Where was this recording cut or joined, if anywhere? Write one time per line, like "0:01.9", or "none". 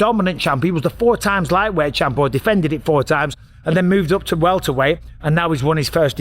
none